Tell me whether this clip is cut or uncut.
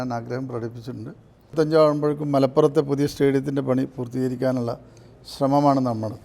cut